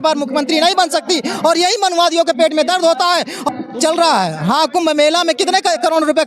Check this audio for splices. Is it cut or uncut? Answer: cut